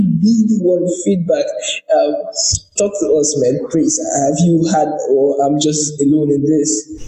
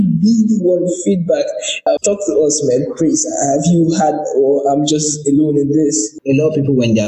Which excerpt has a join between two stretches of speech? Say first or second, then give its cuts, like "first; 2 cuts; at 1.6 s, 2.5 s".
second; 2 cuts; at 1.7 s, 6.1 s